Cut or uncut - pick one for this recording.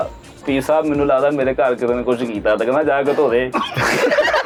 uncut